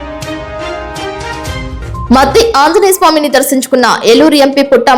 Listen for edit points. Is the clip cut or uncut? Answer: cut